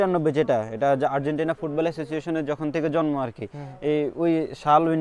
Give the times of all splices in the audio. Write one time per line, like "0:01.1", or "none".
none